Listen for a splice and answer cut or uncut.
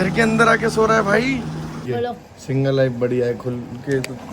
cut